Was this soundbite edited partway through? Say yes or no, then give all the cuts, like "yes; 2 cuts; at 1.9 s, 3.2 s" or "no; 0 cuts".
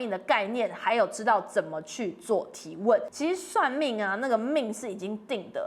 yes; 1 cut; at 3.1 s